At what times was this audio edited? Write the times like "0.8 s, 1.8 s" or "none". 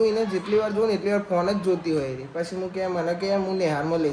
none